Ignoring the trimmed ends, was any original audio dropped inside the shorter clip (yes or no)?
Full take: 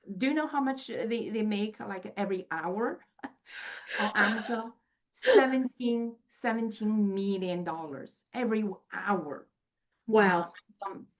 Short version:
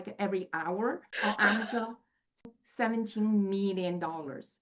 yes